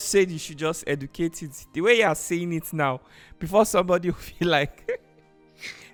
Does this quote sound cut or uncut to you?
uncut